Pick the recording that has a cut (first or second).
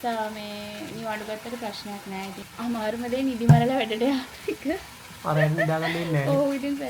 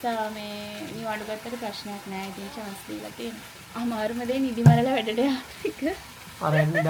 first